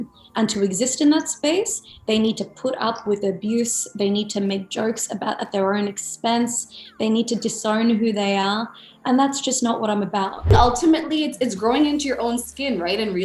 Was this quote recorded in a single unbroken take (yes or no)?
no